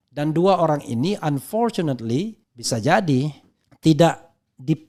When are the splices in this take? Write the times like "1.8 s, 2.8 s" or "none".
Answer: none